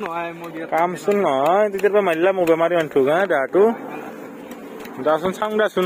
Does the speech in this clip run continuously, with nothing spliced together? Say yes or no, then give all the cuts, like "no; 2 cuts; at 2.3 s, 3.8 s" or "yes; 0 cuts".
yes; 0 cuts